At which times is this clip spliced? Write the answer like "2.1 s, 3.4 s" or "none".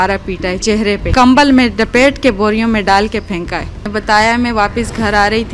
1.1 s, 3.8 s